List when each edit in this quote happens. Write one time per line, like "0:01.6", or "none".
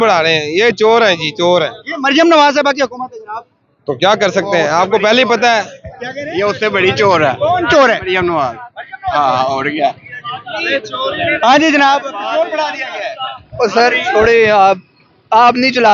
none